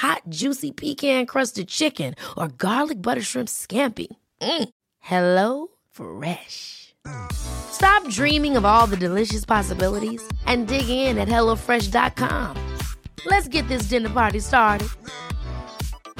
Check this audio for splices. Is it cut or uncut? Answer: uncut